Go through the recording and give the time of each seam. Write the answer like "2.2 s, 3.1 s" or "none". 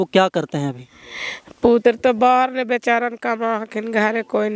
none